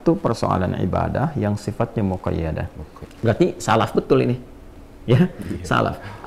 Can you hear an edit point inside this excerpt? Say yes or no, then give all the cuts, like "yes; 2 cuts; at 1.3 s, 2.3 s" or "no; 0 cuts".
yes; 1 cut; at 3.2 s